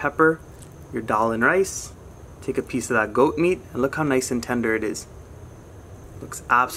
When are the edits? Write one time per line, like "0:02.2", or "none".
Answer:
none